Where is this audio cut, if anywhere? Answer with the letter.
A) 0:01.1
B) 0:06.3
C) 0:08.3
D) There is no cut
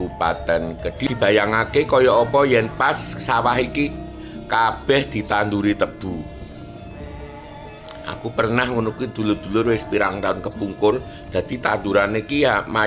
A